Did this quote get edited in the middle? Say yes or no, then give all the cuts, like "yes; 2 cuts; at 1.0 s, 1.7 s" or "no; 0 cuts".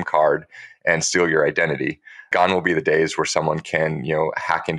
no; 0 cuts